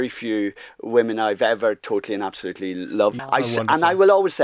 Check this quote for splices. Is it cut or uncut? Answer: cut